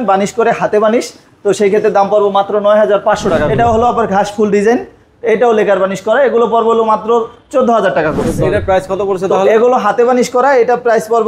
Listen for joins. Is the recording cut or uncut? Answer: cut